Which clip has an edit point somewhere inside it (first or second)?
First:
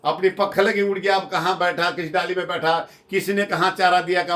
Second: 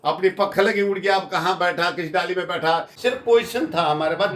second